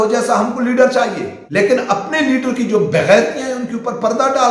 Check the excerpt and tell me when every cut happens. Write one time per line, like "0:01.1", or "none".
0:01.3